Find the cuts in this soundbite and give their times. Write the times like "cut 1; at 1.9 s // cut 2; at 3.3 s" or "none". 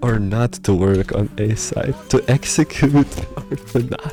none